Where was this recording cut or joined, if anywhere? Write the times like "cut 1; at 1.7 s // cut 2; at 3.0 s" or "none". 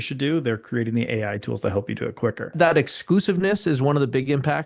cut 1; at 2.5 s